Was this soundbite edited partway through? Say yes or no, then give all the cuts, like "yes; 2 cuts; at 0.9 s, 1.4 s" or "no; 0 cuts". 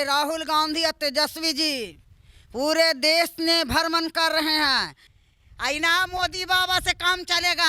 yes; 1 cut; at 5.0 s